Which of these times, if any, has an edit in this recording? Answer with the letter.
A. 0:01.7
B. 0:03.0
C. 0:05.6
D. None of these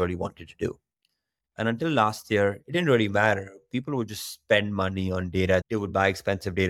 C